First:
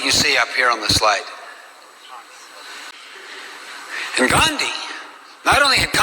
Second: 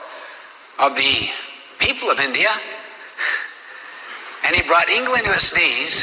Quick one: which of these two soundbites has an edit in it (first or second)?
first